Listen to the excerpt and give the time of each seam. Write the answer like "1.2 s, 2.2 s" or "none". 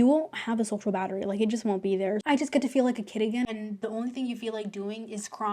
2.2 s, 3.5 s